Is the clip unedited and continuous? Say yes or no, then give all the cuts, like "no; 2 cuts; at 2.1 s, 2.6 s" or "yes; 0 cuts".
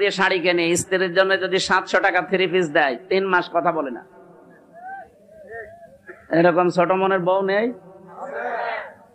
yes; 0 cuts